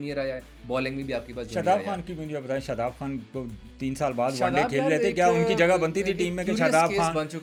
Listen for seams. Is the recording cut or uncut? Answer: uncut